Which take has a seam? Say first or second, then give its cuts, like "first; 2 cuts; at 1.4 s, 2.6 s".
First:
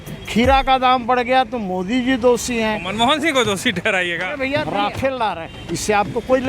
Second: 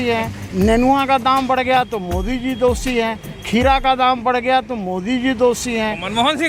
first; 1 cut; at 4.7 s